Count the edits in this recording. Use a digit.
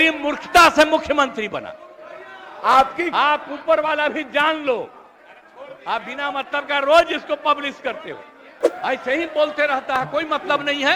1